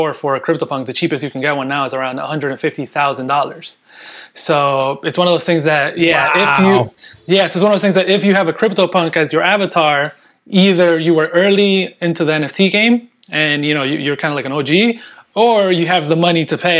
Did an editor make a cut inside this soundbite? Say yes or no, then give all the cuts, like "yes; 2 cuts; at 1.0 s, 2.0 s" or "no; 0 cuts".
no; 0 cuts